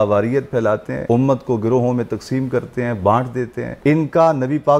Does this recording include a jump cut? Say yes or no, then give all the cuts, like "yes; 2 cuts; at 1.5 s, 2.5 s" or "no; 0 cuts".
yes; 2 cuts; at 0.9 s, 3.6 s